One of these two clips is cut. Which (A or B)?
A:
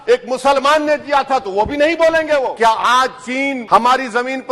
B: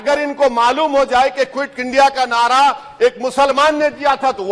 A